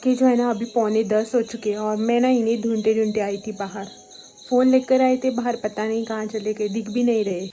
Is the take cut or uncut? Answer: uncut